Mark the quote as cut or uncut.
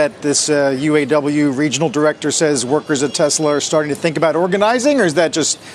uncut